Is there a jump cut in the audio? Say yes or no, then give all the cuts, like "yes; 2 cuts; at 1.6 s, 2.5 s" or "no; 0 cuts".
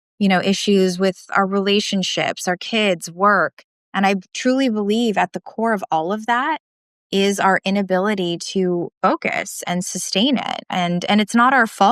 yes; 1 cut; at 8.9 s